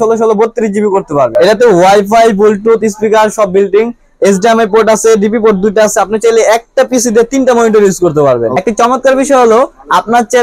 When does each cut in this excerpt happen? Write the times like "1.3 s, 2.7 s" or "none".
1.3 s, 8.6 s